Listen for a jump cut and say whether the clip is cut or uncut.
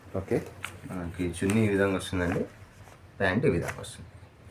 uncut